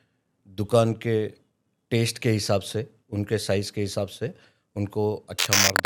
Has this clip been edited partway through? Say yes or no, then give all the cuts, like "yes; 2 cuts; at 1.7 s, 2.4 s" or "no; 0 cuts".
no; 0 cuts